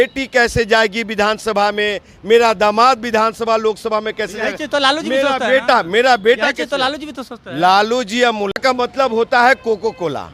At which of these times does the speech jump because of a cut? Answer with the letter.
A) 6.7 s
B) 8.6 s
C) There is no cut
B